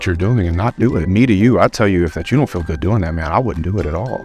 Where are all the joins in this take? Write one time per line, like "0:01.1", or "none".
0:01.0